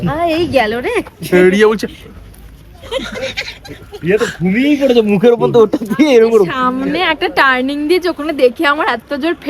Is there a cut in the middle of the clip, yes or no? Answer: no